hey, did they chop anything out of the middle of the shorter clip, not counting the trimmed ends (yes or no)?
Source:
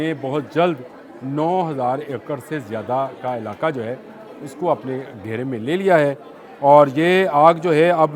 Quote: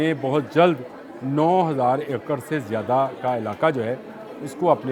no